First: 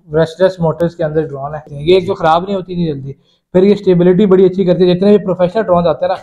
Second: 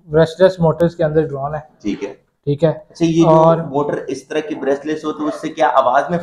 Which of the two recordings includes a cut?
first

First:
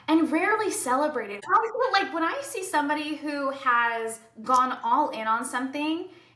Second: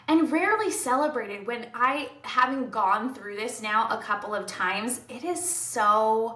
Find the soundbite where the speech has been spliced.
first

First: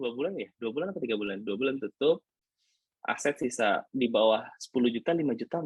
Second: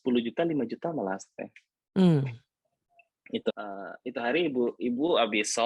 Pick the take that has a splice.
second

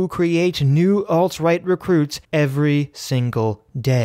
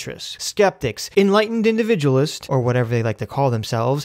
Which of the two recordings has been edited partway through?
second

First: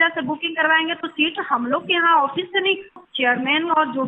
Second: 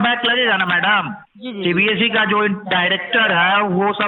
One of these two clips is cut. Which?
first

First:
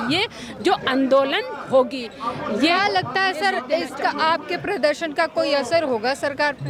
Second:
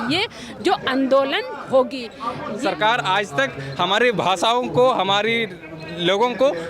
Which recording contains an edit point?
second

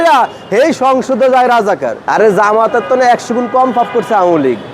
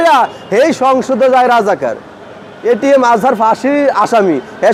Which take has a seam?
first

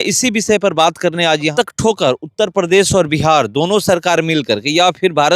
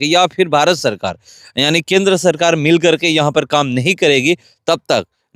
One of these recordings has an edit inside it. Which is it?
first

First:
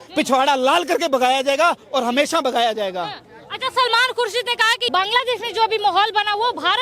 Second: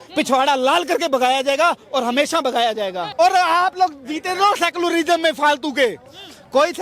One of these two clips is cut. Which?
second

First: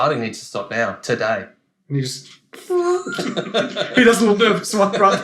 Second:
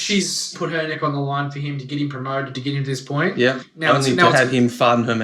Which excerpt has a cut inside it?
second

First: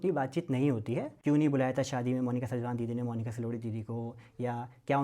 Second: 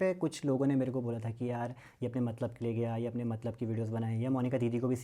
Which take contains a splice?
first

